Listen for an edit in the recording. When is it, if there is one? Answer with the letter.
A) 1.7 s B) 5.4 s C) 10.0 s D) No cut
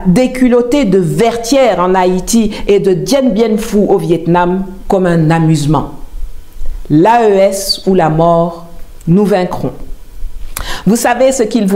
D